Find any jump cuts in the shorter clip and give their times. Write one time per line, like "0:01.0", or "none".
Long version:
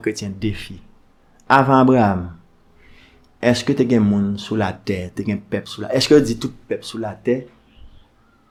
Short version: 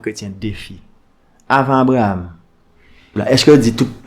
0:03.1